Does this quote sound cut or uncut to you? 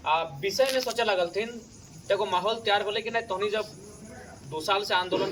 uncut